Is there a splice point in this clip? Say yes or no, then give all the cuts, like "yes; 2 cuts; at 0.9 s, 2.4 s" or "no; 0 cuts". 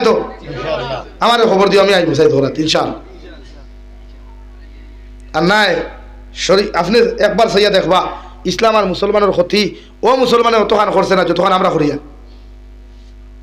no; 0 cuts